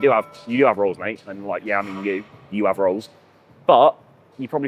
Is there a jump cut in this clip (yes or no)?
no